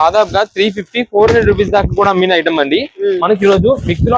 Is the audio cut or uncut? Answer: uncut